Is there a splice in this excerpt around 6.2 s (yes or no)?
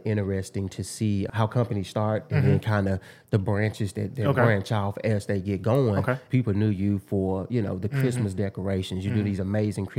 yes